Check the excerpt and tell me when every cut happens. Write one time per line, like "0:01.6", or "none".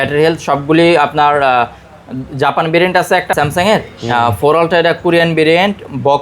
0:03.3